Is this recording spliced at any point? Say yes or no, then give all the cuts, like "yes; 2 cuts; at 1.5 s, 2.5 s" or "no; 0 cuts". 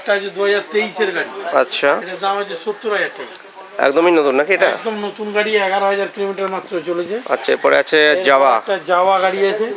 no; 0 cuts